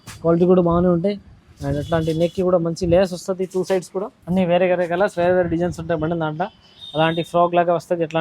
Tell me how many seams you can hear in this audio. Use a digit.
1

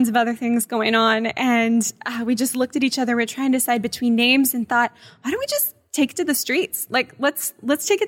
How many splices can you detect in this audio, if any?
0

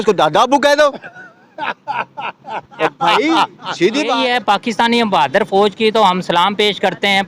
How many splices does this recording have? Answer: 1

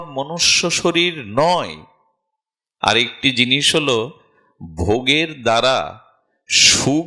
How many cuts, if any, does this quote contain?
0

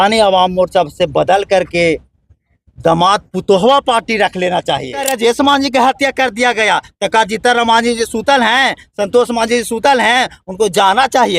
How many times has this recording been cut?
1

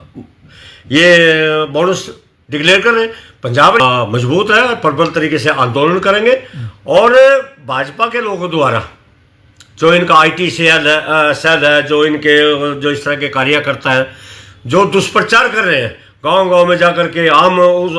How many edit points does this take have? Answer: 1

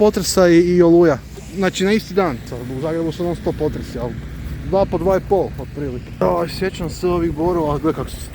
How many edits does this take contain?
1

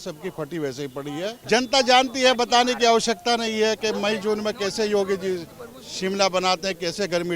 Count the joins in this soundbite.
1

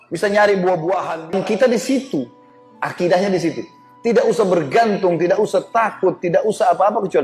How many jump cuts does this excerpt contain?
1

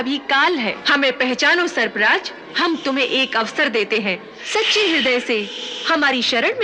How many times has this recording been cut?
3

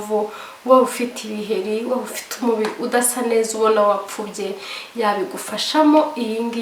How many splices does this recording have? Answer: 0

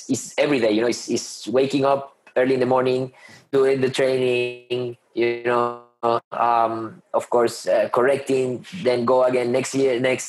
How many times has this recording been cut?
0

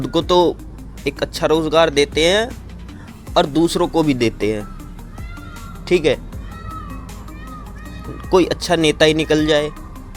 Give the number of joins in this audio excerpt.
0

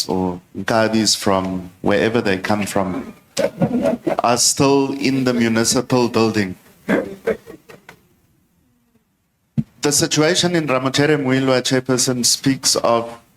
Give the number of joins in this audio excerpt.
0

